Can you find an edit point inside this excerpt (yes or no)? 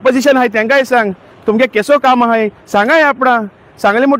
no